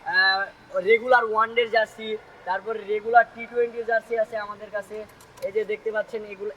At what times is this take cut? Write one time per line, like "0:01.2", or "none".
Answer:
none